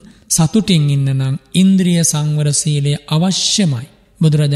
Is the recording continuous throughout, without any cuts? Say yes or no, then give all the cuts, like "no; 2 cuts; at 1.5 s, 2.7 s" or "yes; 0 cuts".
yes; 0 cuts